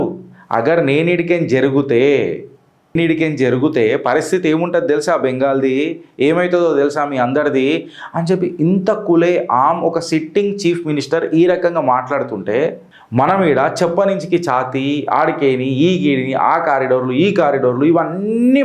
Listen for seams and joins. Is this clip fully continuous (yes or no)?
yes